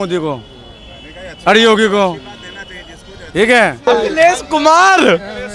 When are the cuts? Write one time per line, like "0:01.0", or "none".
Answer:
0:03.9